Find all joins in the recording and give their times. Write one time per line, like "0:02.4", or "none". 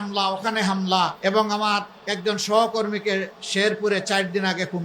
0:01.1
0:02.0